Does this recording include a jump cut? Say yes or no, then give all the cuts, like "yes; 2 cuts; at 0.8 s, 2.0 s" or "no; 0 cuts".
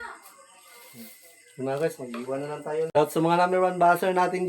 yes; 1 cut; at 2.9 s